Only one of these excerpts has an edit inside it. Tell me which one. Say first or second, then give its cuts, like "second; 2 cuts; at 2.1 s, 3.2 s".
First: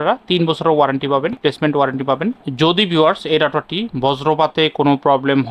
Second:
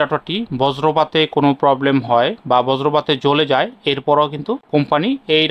first; 2 cuts; at 1.4 s, 2.4 s